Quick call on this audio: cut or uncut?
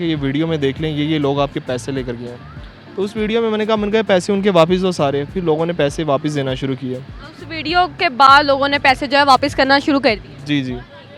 uncut